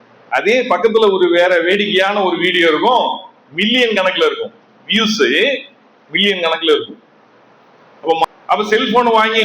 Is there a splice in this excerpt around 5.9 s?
no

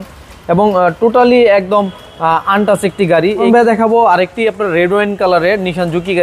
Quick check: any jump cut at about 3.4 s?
yes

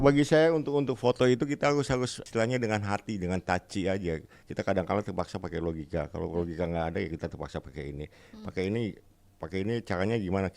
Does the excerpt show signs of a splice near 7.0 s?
no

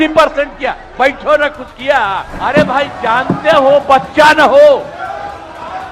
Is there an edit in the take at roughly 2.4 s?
yes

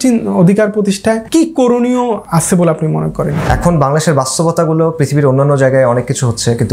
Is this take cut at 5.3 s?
no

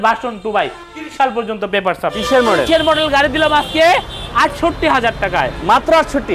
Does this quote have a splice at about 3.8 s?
no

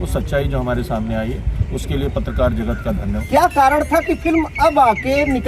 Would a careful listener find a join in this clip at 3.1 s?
yes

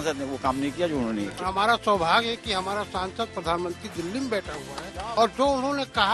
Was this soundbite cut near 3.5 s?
no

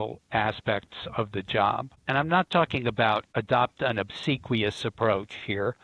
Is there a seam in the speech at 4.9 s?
no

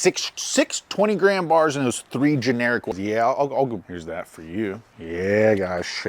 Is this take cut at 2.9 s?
yes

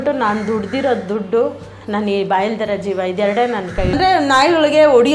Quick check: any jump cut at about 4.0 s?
yes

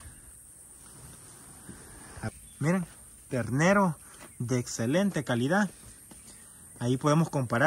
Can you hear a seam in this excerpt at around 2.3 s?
yes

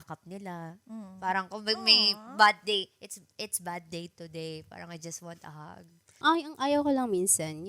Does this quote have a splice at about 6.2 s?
yes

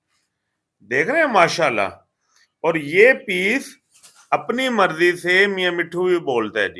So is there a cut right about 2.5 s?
no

